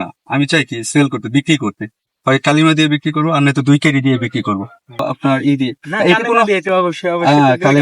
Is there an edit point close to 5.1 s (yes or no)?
yes